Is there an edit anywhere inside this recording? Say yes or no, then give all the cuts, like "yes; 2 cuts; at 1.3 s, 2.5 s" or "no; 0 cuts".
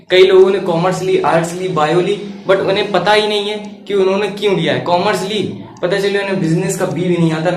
no; 0 cuts